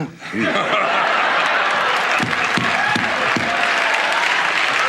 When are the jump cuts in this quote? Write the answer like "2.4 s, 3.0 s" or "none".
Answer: 2.0 s